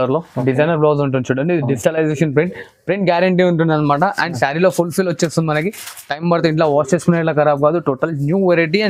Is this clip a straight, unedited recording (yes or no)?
yes